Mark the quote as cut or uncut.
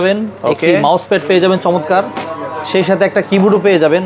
uncut